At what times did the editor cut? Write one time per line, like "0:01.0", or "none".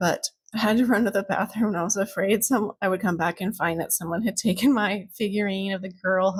none